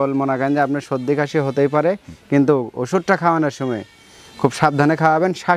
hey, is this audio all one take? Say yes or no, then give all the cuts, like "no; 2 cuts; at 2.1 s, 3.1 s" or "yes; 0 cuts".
yes; 0 cuts